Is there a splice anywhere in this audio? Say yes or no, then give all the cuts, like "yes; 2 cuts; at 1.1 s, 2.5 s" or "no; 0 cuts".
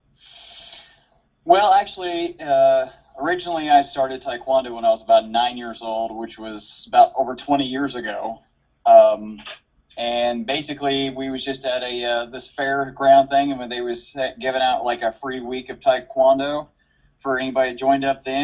yes; 1 cut; at 7.7 s